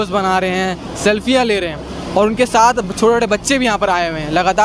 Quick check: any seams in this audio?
no; 0 cuts

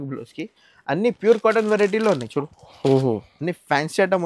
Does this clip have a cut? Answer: no; 0 cuts

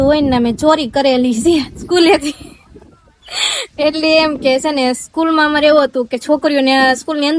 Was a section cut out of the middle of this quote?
no; 0 cuts

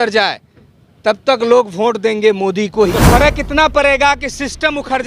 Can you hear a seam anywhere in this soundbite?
yes; 1 cut; at 3.0 s

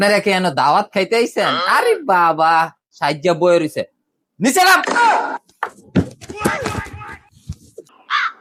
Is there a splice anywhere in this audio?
no; 0 cuts

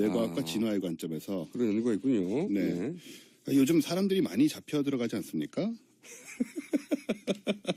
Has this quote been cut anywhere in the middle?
no; 0 cuts

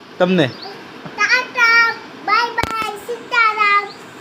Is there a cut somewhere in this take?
no; 0 cuts

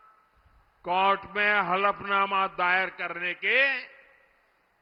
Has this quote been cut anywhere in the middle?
no; 0 cuts

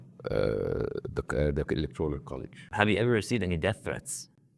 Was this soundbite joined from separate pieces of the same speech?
yes; 1 cut; at 2.7 s

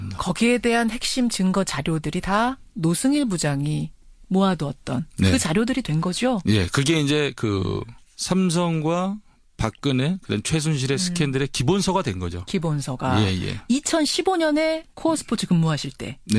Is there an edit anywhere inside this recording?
no; 0 cuts

